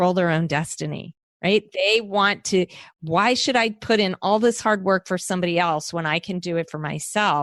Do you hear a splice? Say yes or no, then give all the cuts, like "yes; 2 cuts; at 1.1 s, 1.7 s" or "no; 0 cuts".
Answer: no; 0 cuts